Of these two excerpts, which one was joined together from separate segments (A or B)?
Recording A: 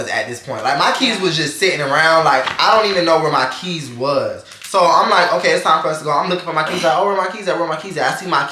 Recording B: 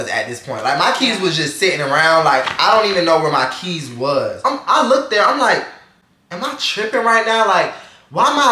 B